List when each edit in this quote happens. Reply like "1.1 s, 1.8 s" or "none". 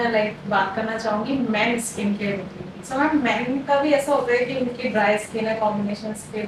none